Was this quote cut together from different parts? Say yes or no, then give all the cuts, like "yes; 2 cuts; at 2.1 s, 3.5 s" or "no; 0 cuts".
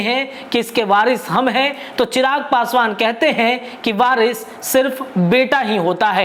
no; 0 cuts